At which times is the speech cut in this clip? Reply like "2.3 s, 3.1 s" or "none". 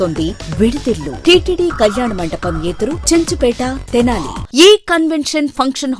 1.1 s, 4.4 s